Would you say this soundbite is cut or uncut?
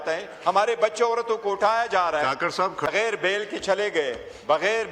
cut